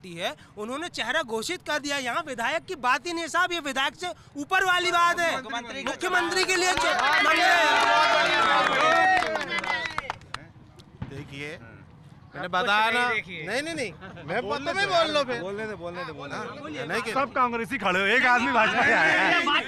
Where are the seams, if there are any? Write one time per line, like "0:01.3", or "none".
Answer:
none